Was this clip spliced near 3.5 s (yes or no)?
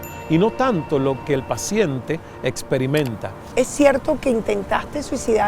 yes